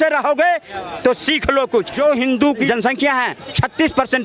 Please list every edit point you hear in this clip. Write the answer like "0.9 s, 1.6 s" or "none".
1.9 s, 3.1 s